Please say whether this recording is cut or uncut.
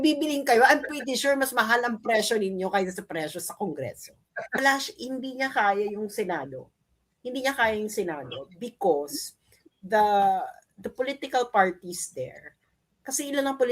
cut